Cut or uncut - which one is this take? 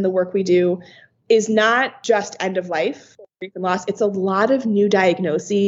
cut